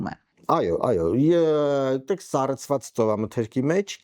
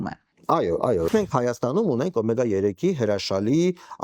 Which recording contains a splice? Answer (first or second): second